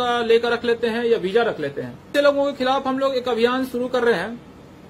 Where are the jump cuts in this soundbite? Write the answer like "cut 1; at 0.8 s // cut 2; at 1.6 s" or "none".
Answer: cut 1; at 2.1 s

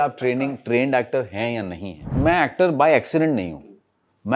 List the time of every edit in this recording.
cut 1; at 2.1 s

